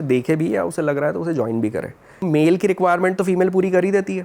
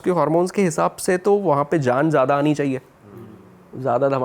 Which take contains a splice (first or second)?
first